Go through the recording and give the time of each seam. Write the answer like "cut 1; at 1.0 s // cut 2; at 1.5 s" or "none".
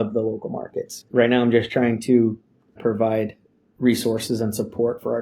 cut 1; at 1.0 s // cut 2; at 2.8 s